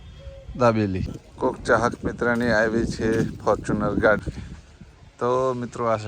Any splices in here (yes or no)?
yes